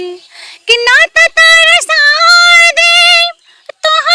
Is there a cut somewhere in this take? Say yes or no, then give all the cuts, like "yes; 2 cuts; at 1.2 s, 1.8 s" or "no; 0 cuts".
no; 0 cuts